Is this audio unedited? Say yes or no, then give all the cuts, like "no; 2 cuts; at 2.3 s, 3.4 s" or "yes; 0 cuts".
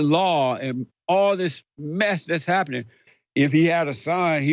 no; 1 cut; at 3.0 s